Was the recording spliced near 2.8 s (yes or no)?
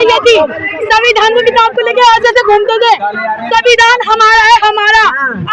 no